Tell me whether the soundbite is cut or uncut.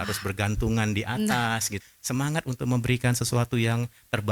cut